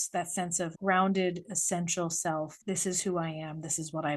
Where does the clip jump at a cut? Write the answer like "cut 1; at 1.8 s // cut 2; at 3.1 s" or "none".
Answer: cut 1; at 2.6 s